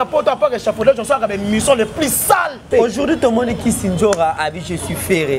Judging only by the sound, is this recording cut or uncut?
cut